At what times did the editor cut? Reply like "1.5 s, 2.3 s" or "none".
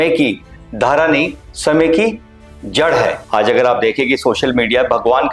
3.2 s